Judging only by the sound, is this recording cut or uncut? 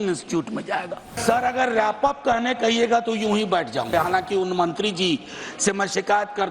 cut